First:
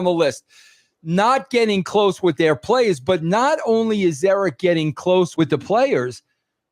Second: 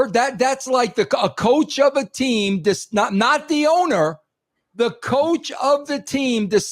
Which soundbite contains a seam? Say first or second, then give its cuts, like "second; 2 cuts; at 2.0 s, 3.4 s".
first; 1 cut; at 5.3 s